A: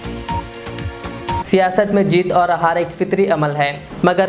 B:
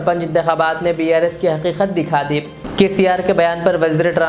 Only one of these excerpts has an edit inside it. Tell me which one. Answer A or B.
A